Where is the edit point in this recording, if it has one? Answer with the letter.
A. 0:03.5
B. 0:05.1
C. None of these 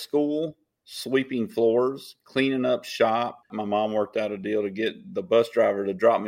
A